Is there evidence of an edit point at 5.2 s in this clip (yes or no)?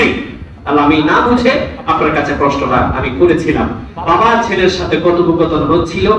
no